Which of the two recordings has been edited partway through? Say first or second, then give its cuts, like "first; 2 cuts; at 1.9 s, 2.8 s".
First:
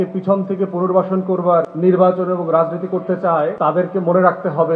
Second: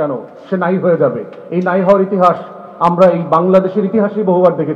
first; 2 cuts; at 1.7 s, 3.6 s